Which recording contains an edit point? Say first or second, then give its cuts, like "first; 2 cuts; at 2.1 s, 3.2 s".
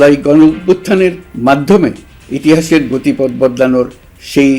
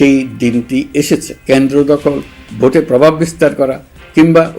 second; 1 cut; at 1.3 s